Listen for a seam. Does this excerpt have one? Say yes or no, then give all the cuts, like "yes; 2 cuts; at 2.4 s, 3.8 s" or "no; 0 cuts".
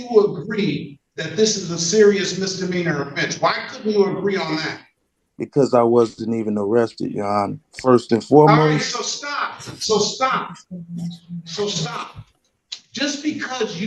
no; 0 cuts